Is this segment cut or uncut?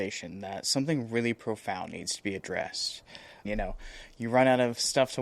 cut